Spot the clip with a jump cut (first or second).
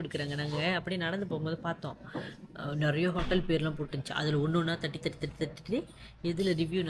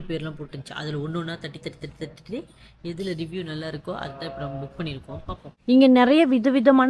second